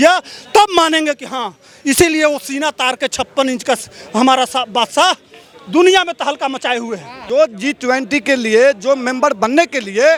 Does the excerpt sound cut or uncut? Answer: uncut